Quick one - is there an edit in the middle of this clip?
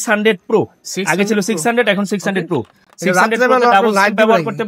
no; 0 cuts

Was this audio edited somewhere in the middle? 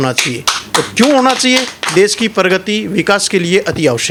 no; 0 cuts

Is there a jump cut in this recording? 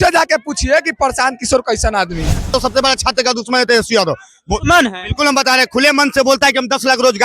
yes; 1 cut; at 2.5 s

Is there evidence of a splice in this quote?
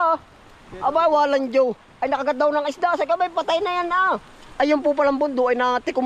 no; 0 cuts

